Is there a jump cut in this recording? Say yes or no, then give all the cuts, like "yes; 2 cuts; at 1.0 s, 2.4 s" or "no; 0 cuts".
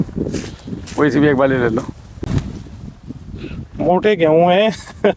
yes; 1 cut; at 2.3 s